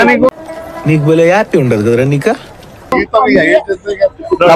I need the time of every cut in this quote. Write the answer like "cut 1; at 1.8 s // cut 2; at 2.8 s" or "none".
none